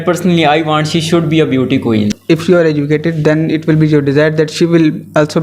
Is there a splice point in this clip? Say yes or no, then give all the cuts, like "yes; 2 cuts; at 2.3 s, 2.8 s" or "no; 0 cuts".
yes; 1 cut; at 2.1 s